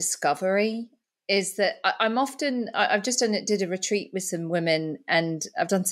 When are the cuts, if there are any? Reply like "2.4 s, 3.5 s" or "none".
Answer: none